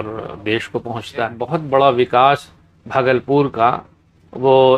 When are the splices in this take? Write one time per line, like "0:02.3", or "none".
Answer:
0:01.4